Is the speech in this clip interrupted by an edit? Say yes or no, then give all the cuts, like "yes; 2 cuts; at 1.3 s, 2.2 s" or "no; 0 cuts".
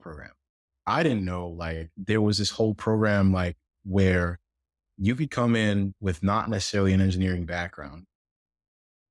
no; 0 cuts